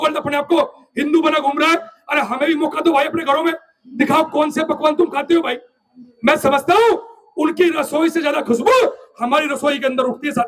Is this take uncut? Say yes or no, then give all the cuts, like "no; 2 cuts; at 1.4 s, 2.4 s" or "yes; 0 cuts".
yes; 0 cuts